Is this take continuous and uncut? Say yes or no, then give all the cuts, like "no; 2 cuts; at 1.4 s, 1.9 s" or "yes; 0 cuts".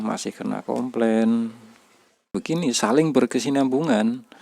no; 1 cut; at 2.4 s